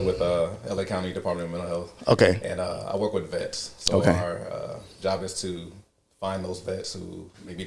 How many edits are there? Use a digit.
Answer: 0